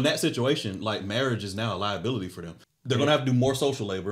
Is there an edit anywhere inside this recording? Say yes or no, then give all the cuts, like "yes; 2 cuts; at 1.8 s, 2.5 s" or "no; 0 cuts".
yes; 1 cut; at 2.6 s